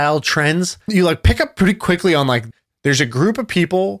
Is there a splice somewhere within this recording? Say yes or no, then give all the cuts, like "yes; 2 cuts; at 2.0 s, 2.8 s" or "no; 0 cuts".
yes; 2 cuts; at 0.9 s, 2.5 s